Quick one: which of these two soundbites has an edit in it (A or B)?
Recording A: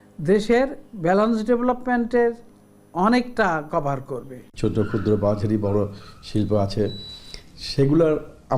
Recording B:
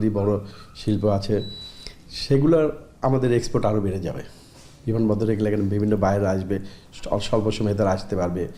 A